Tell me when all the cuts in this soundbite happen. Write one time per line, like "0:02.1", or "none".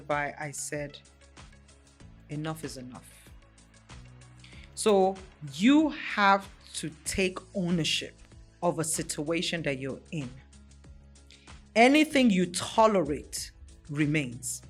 none